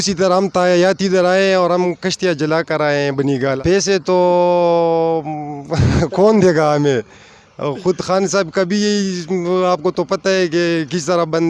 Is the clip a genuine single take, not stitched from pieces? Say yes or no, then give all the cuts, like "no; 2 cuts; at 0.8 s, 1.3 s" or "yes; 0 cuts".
no; 1 cut; at 3.6 s